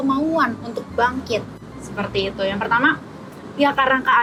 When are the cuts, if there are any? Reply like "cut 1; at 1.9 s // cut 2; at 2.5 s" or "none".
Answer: none